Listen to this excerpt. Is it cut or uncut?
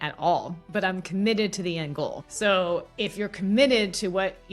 cut